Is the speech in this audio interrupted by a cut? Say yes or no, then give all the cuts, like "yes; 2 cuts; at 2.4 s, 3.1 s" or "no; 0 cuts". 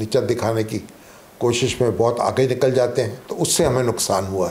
no; 0 cuts